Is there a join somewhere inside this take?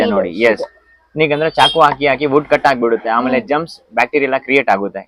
no; 0 cuts

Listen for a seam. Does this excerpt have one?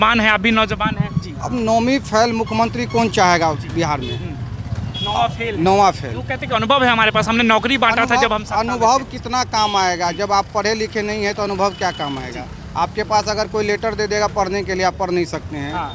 no; 0 cuts

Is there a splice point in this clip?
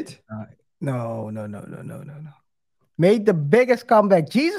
no; 0 cuts

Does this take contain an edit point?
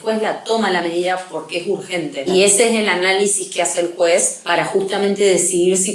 yes; 2 cuts; at 2.3 s, 4.4 s

